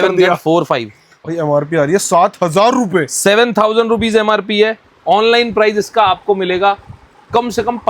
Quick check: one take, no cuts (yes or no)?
no